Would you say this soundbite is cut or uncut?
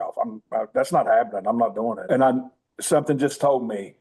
cut